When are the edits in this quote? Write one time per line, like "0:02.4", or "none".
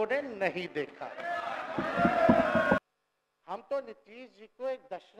0:02.8